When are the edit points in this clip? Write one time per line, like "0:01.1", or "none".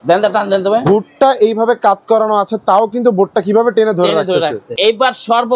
0:04.6